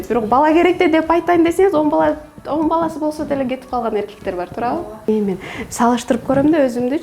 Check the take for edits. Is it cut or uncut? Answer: cut